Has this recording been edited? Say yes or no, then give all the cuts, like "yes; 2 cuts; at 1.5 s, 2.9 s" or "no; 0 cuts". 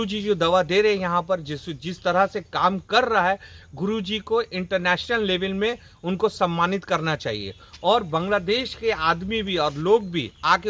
no; 0 cuts